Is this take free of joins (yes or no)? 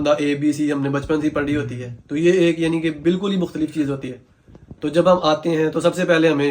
yes